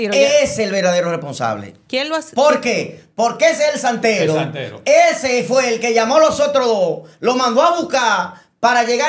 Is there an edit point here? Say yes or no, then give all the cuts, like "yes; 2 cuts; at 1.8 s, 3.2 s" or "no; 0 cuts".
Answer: no; 0 cuts